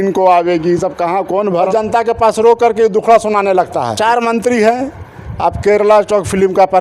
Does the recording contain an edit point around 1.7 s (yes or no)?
yes